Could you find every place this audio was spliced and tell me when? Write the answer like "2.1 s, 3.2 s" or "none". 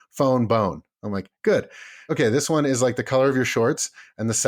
2.1 s